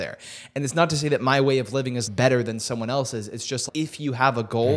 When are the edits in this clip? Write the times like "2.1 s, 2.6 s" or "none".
2.0 s, 3.6 s